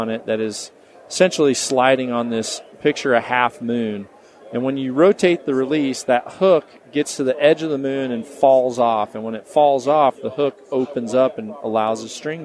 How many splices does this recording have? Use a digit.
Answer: 0